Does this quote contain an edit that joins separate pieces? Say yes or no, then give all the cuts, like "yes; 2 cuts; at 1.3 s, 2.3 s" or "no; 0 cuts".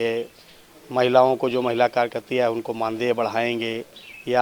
no; 0 cuts